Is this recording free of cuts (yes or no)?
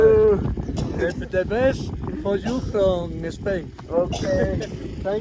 yes